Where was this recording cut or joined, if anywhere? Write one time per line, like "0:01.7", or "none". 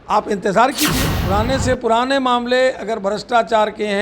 0:01.1